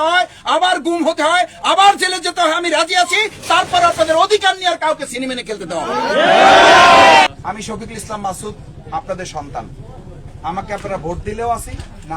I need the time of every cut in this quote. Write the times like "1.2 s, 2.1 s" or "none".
7.3 s